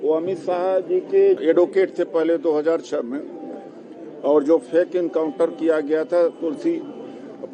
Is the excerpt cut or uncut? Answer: cut